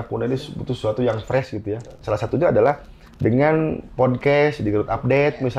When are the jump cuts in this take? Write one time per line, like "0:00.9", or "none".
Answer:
0:02.0